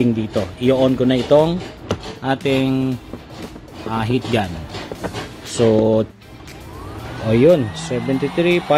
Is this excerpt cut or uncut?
uncut